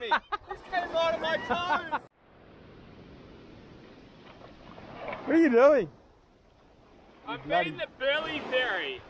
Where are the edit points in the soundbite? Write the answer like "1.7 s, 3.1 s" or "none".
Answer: 2.1 s